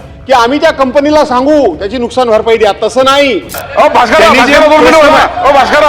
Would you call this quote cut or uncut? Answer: cut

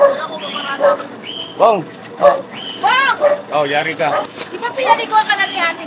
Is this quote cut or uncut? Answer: cut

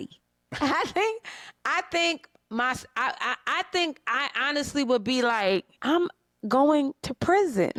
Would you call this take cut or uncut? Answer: uncut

